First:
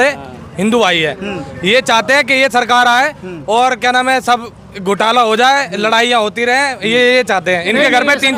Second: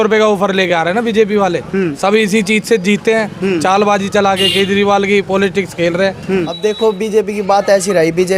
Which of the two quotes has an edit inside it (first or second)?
second